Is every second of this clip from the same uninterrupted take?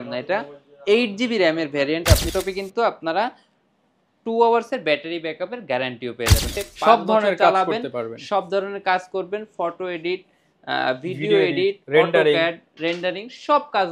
no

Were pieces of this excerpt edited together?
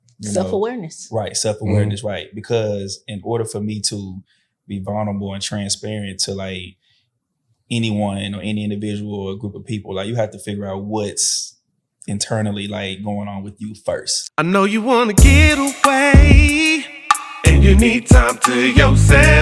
yes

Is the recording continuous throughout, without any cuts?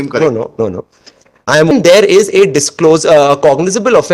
no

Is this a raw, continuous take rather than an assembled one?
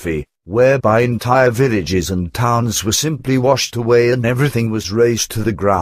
yes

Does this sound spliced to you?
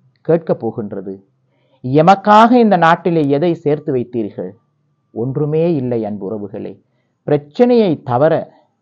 no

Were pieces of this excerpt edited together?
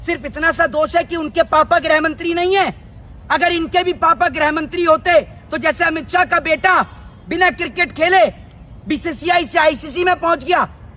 no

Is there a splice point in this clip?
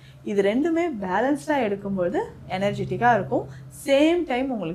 no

